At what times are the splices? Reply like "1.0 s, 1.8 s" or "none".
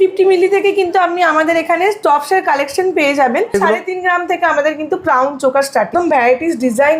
3.5 s, 5.9 s